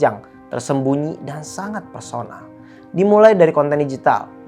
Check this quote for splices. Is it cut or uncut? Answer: uncut